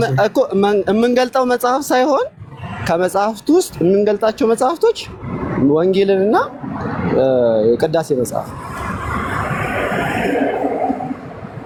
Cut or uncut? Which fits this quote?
uncut